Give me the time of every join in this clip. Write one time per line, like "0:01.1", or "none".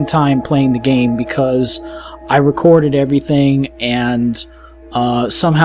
0:03.3